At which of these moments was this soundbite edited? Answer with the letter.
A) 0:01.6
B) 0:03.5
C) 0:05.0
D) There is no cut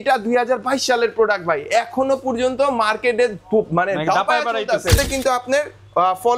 C